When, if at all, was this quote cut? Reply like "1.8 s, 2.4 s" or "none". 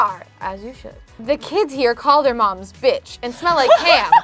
1.1 s